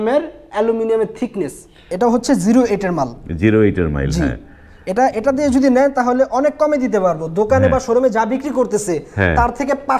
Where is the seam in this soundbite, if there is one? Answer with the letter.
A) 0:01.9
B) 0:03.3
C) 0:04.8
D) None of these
A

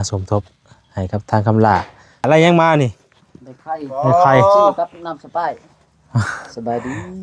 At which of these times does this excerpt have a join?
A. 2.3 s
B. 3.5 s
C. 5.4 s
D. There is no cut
A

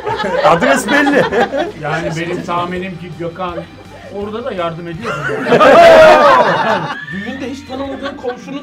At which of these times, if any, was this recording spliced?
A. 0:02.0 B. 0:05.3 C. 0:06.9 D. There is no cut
C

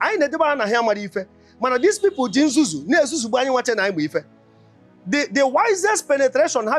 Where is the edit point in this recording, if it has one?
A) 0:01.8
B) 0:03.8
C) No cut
C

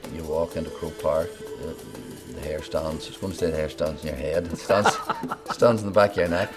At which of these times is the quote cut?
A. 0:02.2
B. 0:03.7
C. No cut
C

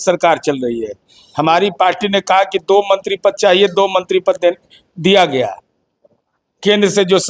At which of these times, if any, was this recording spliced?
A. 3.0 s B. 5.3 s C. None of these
C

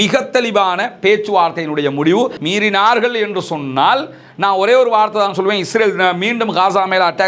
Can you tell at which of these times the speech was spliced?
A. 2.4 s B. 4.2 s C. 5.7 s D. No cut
A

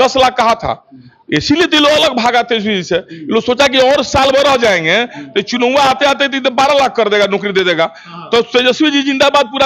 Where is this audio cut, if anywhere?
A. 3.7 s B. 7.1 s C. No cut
C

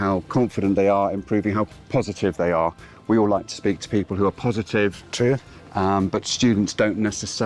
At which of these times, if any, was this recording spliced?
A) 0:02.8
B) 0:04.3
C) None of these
C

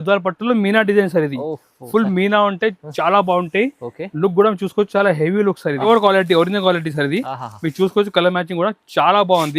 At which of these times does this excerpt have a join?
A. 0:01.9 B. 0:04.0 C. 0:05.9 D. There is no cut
C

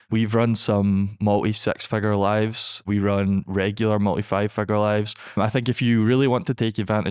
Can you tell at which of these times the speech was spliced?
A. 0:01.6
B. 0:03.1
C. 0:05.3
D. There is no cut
C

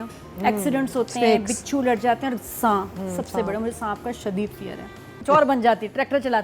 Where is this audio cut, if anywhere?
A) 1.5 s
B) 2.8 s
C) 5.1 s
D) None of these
C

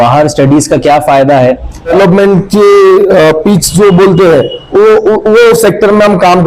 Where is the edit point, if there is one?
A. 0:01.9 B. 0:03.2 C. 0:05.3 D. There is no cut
A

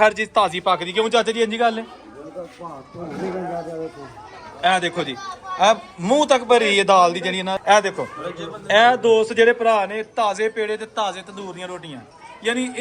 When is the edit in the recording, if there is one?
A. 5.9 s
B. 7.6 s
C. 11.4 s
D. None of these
B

